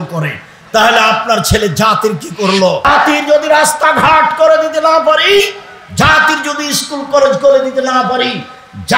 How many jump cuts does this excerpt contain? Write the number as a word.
one